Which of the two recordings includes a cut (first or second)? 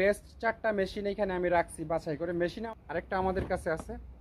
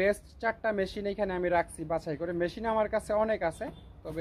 first